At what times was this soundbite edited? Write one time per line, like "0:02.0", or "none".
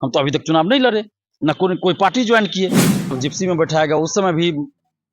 0:03.1